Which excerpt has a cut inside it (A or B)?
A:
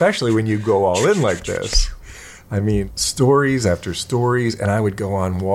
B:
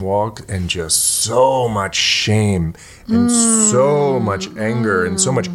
A